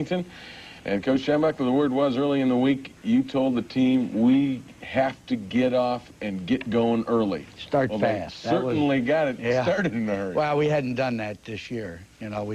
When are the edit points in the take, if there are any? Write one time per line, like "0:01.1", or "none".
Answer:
none